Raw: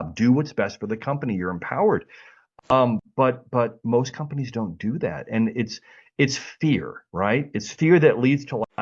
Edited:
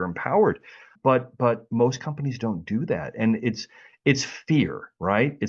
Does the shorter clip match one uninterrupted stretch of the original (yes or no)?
no